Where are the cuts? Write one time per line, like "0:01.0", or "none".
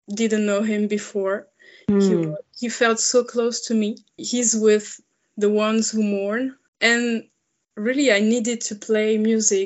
0:04.2
0:06.6